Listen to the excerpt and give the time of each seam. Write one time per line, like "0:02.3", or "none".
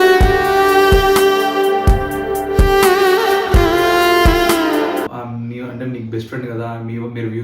0:05.2